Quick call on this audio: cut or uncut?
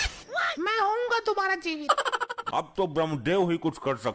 cut